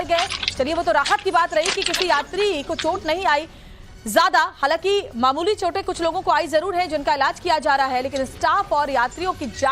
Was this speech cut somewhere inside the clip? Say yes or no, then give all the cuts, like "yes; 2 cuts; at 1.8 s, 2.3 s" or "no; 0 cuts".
yes; 1 cut; at 1.1 s